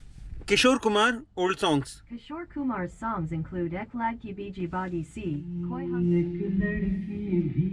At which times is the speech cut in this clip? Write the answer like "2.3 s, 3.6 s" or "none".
2.3 s, 5.5 s